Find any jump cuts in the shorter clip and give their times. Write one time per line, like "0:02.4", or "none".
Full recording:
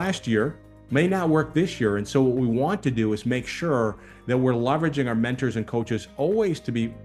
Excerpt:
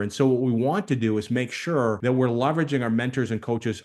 0:02.0

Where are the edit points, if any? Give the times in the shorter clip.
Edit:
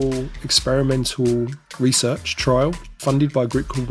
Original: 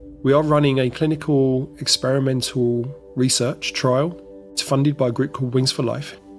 0:02.9

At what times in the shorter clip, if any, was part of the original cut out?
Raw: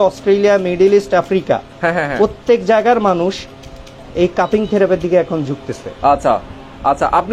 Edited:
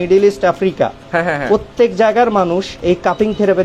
0:02.7

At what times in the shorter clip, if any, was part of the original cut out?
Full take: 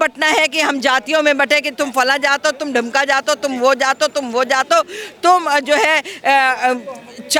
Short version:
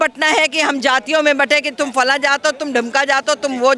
none

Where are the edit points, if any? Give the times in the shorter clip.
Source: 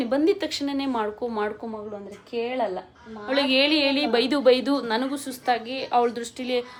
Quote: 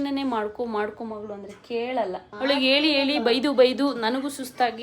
0:02.3

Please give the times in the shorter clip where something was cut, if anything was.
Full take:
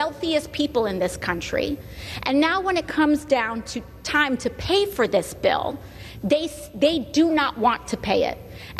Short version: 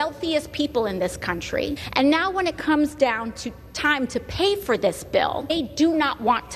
0:01.8
0:05.5

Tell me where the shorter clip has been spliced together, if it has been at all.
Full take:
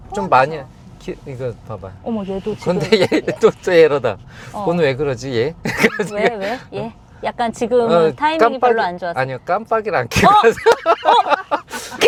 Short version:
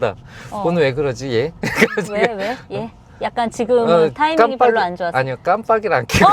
none

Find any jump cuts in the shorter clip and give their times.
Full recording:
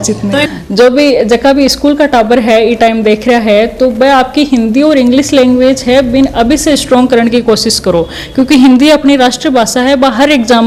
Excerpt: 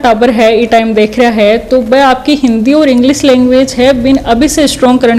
none

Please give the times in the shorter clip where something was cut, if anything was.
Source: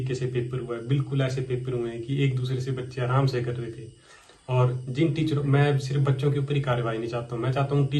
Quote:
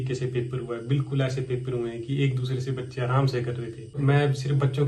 0:04.0

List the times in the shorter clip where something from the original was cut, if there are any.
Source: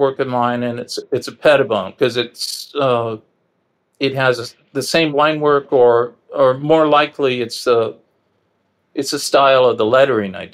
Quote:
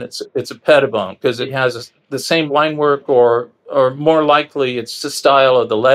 0:01.5
0:04.9

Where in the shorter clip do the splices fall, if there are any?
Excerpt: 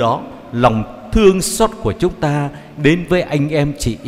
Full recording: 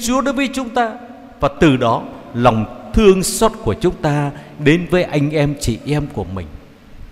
none

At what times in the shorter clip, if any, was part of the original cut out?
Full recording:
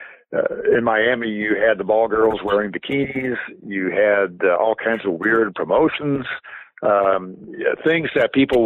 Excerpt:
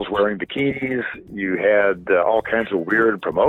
none

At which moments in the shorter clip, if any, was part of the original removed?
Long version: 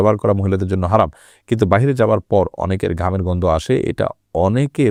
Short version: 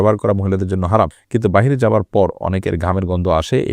0:01.2

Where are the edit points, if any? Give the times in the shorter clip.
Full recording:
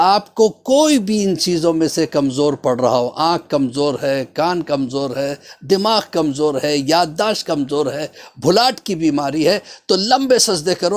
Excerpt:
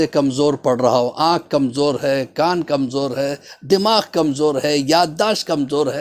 none

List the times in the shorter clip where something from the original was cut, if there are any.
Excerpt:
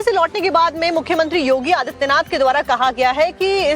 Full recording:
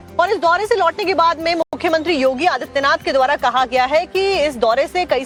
0:01.0

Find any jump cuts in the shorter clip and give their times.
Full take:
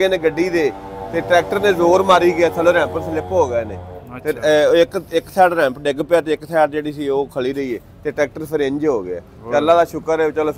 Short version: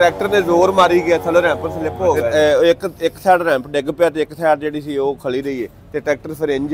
0:02.2

